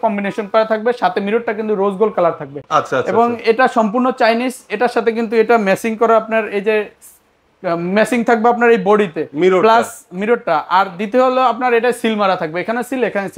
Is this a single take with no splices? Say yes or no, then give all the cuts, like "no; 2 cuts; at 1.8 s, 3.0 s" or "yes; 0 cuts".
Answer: yes; 0 cuts